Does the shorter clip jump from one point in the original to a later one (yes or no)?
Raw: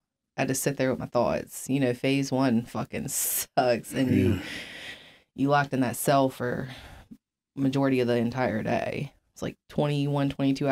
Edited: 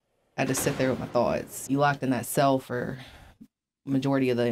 yes